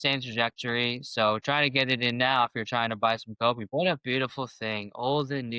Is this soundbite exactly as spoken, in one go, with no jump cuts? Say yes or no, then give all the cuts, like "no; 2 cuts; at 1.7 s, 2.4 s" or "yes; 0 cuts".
no; 1 cut; at 3.7 s